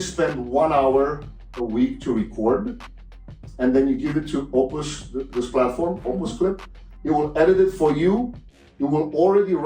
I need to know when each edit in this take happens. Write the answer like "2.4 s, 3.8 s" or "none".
none